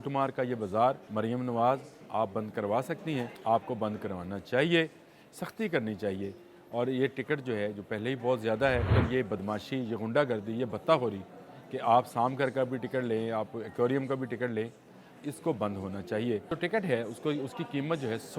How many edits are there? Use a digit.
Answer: 4